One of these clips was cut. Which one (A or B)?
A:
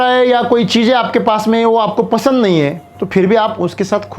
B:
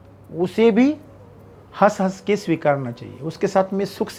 A